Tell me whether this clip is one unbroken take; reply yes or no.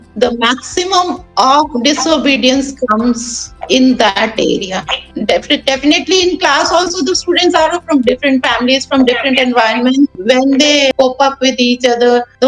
no